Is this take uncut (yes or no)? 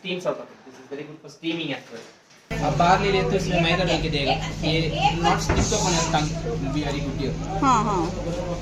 no